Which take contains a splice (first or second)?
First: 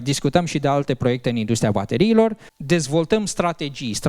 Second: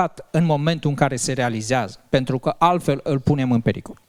first